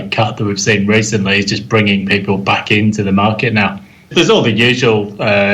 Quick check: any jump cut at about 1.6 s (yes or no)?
no